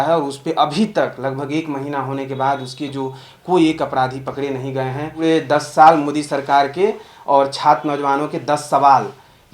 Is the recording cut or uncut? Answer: cut